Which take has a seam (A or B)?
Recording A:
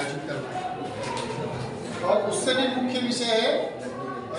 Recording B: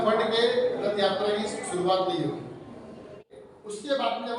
B